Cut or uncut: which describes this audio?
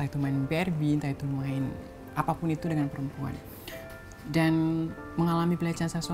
uncut